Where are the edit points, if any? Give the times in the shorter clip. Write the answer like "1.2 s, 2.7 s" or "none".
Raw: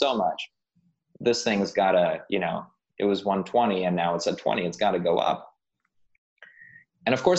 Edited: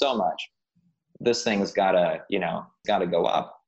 2.8 s